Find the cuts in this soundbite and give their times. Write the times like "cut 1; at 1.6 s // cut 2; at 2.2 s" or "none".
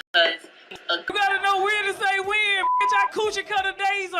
cut 1; at 1.1 s